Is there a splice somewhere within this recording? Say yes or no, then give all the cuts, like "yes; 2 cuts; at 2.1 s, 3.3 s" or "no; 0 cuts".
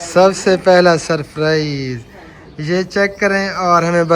no; 0 cuts